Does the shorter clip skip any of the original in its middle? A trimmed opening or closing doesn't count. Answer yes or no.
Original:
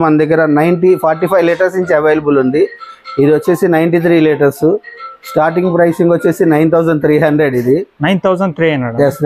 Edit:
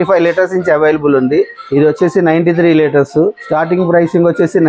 yes